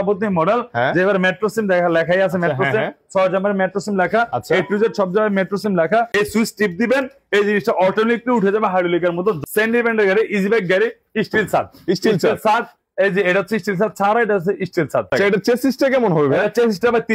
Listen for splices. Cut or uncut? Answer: cut